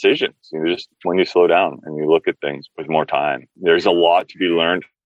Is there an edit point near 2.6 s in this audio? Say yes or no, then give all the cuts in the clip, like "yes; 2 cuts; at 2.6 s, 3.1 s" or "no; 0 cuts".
yes; 2 cuts; at 2.6 s, 3.5 s